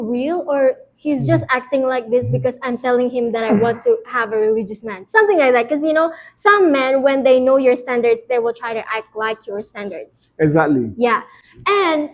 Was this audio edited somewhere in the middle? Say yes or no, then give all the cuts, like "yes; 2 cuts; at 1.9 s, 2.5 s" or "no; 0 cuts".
no; 0 cuts